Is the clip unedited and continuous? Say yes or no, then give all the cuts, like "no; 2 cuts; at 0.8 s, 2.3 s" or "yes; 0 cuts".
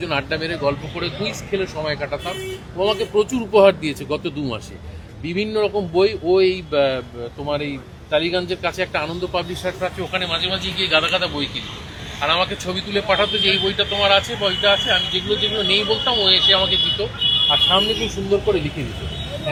yes; 0 cuts